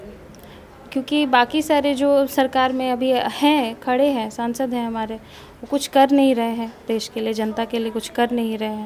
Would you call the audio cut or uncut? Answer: uncut